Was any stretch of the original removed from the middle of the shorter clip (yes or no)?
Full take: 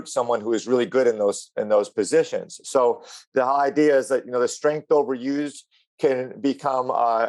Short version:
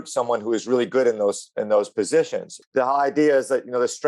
yes